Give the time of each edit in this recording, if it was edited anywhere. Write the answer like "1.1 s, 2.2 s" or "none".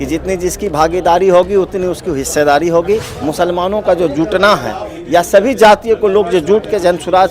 3.2 s